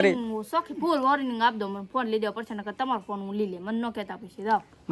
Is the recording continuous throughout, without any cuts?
yes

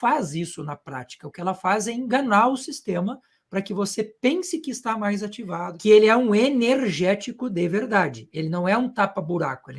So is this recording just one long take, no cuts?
no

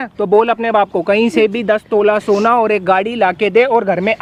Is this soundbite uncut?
yes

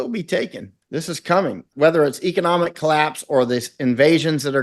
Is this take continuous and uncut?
no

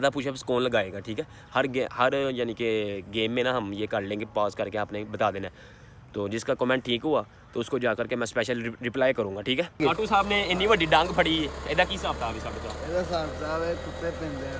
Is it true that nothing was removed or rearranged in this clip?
no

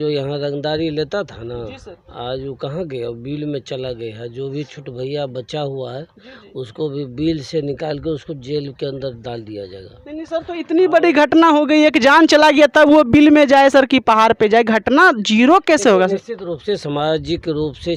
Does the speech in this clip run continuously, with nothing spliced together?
yes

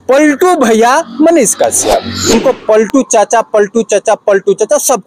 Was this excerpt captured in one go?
no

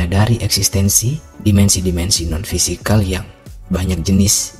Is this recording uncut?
yes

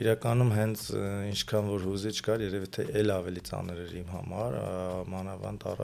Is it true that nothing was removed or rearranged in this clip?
yes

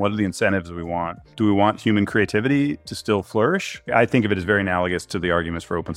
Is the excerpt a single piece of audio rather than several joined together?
no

